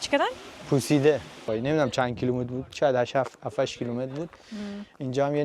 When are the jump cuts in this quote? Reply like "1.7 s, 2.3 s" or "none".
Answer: 1.4 s